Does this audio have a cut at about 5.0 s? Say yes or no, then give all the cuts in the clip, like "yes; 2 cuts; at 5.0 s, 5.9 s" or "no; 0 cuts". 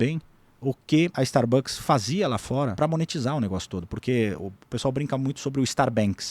no; 2 cuts; at 1.1 s, 2.7 s